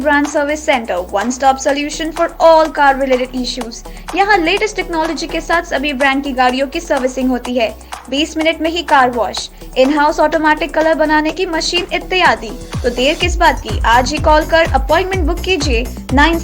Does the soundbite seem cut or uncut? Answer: uncut